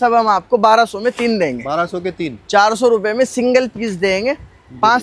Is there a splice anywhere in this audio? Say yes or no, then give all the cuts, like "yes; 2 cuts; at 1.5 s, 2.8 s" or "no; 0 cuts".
no; 0 cuts